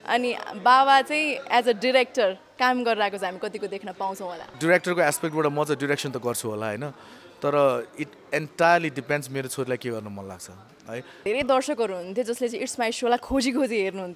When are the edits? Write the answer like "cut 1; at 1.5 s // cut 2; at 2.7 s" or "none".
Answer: cut 1; at 4.5 s // cut 2; at 11.2 s